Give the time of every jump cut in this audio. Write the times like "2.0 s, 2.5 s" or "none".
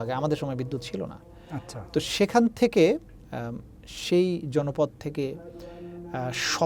none